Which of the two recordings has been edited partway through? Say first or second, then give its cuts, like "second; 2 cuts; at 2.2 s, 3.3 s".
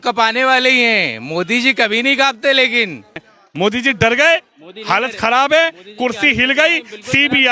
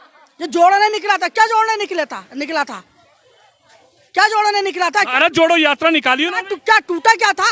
first; 1 cut; at 3.3 s